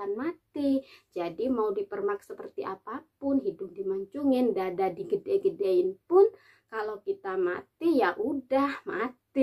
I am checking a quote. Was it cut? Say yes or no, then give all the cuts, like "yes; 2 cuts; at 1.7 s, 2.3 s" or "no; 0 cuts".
no; 0 cuts